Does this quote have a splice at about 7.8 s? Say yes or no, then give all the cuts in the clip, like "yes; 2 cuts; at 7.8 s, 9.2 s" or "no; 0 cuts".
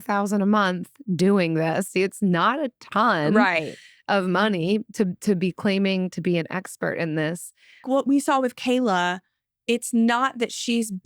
yes; 2 cuts; at 1.9 s, 7.8 s